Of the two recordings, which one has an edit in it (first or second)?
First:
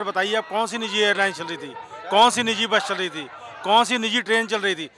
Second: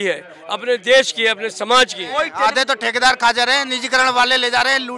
second